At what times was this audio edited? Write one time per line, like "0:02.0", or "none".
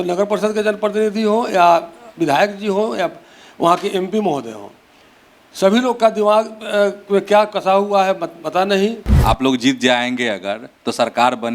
0:09.1